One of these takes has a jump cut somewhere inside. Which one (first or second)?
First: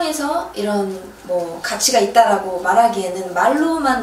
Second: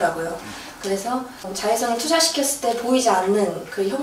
second